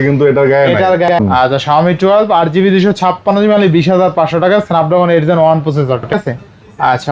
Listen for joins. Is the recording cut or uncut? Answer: cut